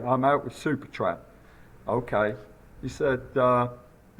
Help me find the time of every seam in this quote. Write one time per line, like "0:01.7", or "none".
none